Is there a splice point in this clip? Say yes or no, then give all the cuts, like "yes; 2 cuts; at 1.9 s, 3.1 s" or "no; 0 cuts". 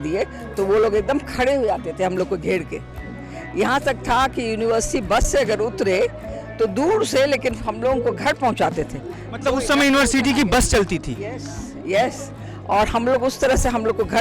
no; 0 cuts